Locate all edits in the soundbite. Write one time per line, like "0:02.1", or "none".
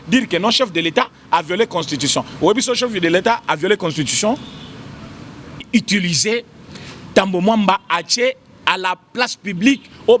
0:05.6